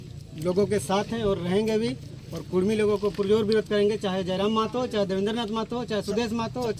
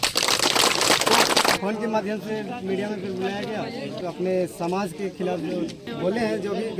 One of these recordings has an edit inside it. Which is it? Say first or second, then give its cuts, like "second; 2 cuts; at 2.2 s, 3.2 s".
second; 3 cuts; at 1.6 s, 4.0 s, 5.9 s